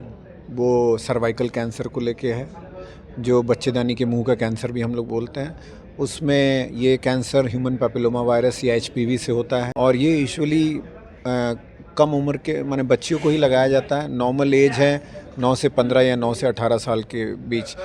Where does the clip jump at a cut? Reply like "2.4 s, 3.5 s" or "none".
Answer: 9.7 s